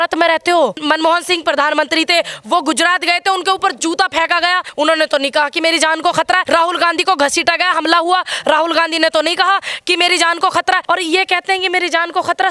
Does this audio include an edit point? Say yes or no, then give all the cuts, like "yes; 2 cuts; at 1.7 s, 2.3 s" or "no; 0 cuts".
yes; 4 cuts; at 0.8 s, 4.7 s, 6.4 s, 10.8 s